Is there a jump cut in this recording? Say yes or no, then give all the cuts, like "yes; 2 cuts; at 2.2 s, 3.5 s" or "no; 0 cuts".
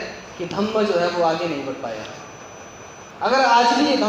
no; 0 cuts